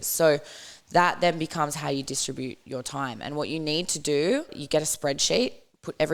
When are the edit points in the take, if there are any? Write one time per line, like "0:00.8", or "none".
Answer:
0:04.6